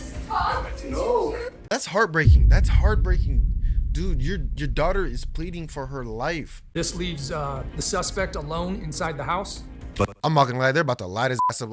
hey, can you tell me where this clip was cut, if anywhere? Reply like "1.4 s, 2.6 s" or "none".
1.7 s, 6.6 s